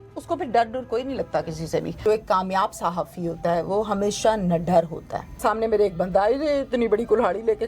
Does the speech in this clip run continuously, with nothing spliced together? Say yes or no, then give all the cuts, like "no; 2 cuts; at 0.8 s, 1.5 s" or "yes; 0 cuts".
no; 2 cuts; at 2.0 s, 5.4 s